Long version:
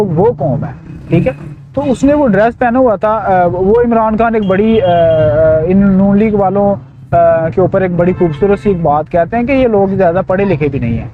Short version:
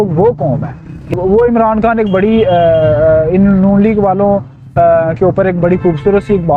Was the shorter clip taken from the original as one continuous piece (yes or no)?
no